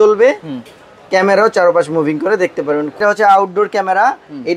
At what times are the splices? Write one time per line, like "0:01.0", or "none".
0:03.0